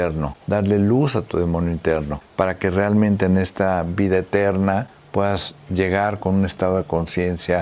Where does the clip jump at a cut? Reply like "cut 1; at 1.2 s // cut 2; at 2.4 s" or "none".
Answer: none